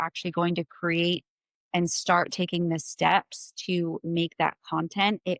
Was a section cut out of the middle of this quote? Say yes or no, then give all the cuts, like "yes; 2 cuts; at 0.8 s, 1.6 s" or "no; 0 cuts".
no; 0 cuts